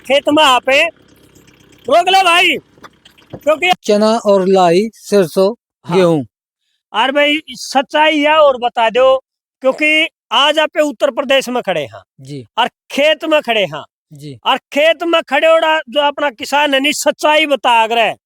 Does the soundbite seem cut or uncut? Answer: cut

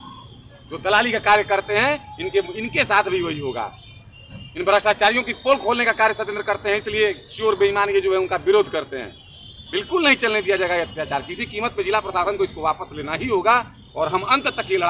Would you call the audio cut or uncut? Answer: uncut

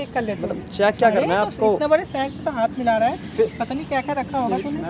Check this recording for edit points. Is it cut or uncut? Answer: uncut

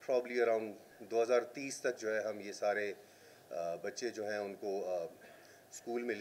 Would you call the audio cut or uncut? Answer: uncut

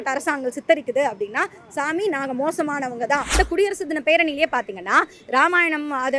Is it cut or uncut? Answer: cut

